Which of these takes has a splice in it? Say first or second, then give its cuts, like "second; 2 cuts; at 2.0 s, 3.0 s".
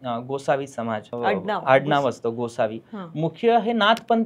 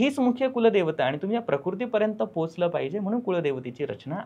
first; 1 cut; at 1.1 s